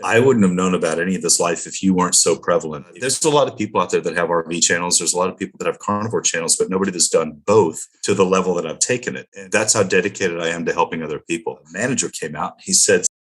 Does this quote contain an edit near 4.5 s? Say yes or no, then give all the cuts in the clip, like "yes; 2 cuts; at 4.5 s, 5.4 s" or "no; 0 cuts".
no; 4 cuts; at 2.9 s, 7.9 s, 9.2 s, 11.7 s